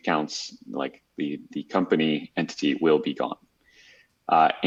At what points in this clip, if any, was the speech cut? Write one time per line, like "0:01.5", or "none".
none